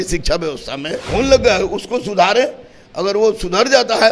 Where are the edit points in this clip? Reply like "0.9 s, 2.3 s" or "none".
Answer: 1.1 s